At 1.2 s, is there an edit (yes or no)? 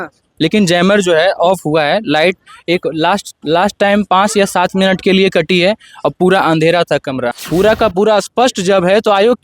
no